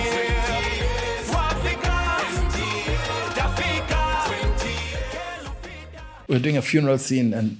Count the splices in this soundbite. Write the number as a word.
one